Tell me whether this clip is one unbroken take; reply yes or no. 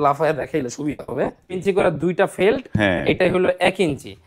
no